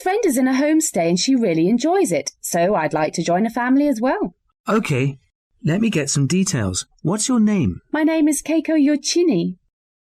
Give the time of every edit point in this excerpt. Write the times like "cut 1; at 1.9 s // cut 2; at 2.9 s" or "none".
cut 1; at 1.2 s